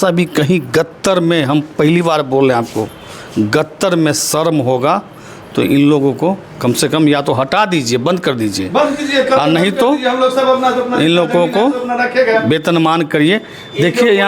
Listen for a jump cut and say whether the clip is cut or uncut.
uncut